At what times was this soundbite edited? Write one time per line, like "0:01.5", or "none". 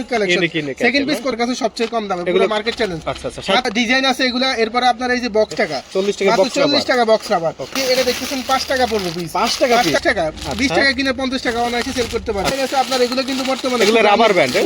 0:01.3
0:03.7
0:05.5
0:07.7
0:10.0
0:12.5